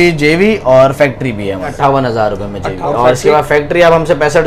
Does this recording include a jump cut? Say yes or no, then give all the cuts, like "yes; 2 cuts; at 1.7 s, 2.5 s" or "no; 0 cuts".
yes; 2 cuts; at 1.7 s, 2.8 s